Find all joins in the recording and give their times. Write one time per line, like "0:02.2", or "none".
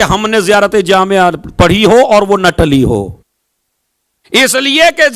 none